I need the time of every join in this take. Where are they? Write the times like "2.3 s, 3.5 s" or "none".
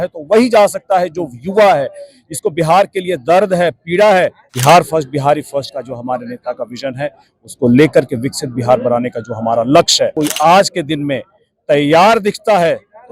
4.5 s, 10.1 s